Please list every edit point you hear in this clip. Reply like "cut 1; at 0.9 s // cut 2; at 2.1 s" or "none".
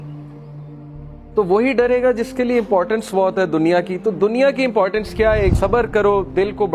cut 1; at 5.5 s